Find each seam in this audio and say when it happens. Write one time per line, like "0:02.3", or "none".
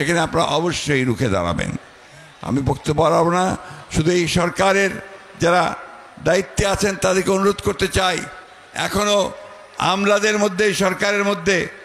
none